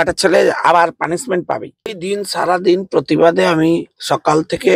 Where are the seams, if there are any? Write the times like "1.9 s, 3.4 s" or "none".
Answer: 2.0 s